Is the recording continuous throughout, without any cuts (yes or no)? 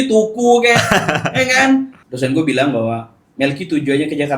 no